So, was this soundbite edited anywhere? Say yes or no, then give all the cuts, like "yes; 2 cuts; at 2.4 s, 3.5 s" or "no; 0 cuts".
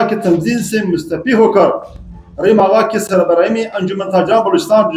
no; 0 cuts